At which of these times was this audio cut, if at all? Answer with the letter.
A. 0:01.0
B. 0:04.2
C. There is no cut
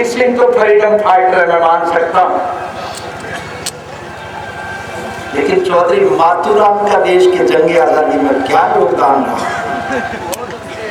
C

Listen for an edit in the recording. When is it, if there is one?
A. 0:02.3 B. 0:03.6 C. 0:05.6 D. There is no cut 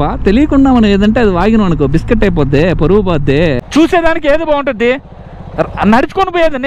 B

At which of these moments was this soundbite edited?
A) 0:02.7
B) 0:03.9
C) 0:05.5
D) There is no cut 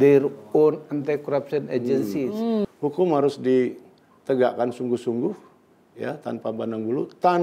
A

